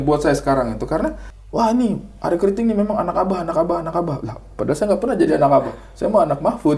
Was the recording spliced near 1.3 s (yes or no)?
yes